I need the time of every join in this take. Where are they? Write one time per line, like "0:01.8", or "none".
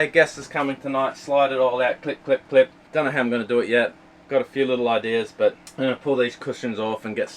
0:02.8
0:05.7